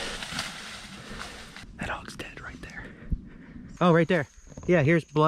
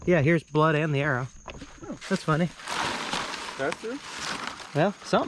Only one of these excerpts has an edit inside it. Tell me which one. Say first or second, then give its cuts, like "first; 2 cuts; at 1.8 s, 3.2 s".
first; 2 cuts; at 1.7 s, 3.7 s